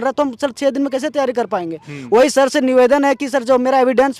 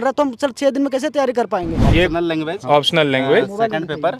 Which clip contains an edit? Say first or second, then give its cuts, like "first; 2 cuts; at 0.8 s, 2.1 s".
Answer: second; 1 cut; at 1.8 s